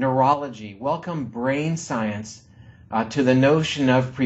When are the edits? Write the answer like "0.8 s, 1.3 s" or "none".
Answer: none